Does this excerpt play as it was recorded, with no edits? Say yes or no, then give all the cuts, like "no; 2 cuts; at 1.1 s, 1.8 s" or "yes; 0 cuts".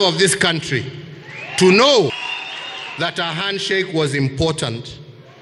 no; 1 cut; at 2.1 s